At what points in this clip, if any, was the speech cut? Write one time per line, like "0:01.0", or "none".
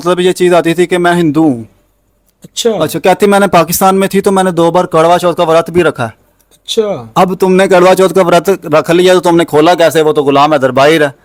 none